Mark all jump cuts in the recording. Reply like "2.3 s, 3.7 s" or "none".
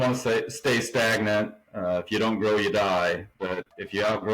1.6 s, 3.4 s